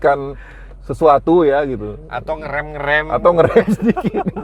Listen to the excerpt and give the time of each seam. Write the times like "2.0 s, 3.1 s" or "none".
none